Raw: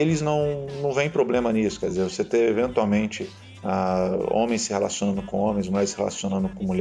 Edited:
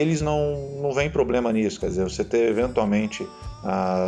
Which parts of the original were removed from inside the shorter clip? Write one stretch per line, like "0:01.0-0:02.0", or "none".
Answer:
none